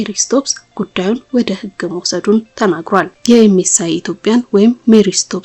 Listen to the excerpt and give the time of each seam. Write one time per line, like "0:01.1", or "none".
0:03.1